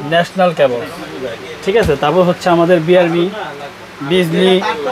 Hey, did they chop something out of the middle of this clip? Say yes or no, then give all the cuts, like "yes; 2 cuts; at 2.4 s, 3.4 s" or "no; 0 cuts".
no; 0 cuts